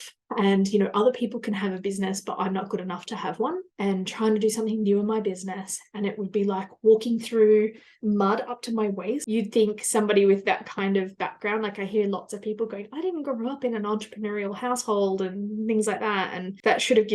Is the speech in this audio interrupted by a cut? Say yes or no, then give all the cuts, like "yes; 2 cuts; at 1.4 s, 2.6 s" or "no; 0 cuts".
yes; 2 cuts; at 3.7 s, 9.2 s